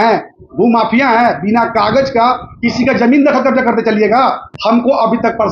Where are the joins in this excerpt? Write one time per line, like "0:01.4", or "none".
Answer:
0:04.5